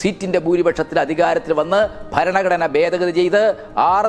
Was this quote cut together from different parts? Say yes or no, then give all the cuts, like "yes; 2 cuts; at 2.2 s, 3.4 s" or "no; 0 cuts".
no; 0 cuts